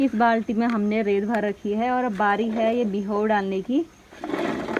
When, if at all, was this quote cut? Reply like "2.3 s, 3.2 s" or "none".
none